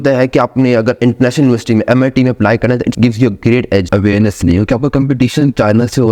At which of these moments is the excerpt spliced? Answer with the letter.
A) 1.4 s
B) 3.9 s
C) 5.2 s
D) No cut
B